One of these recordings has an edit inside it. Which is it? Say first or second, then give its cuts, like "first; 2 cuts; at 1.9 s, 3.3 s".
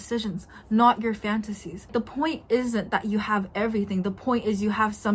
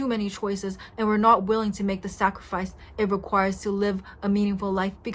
first; 1 cut; at 1.9 s